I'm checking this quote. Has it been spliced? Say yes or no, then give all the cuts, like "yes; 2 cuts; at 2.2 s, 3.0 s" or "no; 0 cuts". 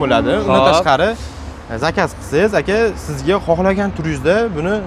no; 0 cuts